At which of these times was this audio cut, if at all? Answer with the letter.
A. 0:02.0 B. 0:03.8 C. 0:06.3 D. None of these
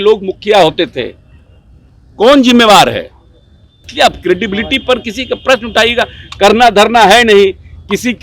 B